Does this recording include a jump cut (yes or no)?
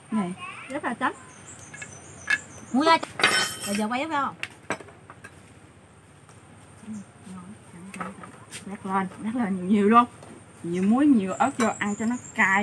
no